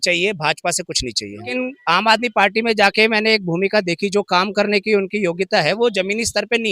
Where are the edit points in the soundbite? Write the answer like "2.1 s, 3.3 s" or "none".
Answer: 1.5 s